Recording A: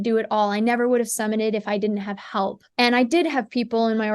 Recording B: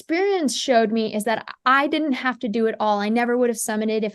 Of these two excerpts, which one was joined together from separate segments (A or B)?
A